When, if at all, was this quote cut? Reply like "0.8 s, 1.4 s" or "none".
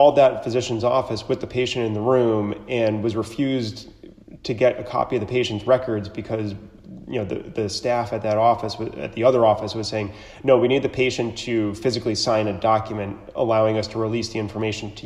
none